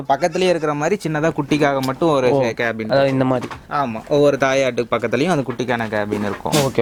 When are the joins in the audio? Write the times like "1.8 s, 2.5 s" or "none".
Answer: none